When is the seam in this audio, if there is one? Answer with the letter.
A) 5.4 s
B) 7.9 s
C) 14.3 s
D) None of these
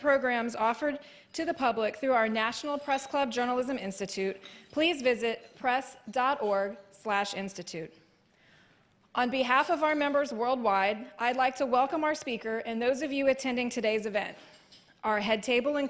D